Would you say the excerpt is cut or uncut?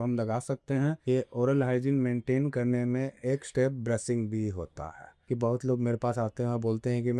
cut